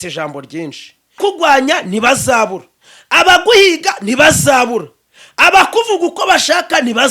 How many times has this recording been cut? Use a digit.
1